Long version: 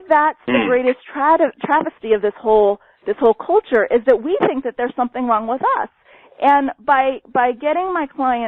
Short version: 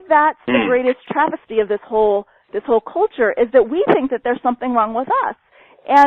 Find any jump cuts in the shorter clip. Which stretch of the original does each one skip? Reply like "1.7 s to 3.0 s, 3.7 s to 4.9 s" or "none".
1.1 s to 1.6 s